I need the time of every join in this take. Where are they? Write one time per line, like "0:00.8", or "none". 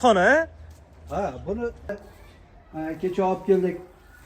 0:02.1